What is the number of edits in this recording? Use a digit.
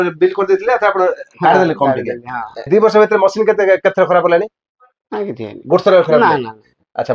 1